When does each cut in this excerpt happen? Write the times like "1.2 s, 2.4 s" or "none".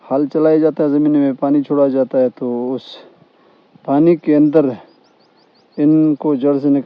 none